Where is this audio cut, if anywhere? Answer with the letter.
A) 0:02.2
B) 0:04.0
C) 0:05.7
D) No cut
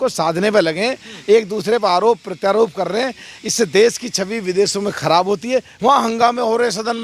C